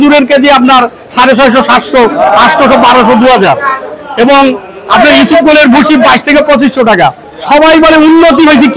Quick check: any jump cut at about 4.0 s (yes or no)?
no